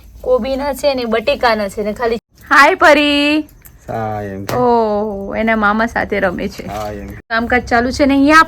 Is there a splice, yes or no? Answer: yes